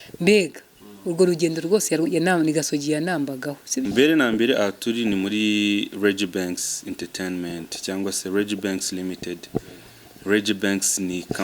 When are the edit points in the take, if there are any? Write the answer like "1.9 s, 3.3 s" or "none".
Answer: 3.9 s